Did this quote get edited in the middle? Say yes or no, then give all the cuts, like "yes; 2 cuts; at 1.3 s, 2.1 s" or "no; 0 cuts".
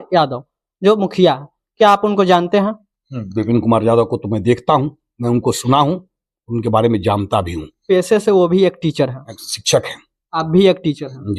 no; 0 cuts